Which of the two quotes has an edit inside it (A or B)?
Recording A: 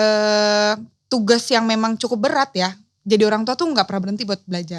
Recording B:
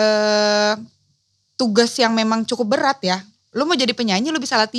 A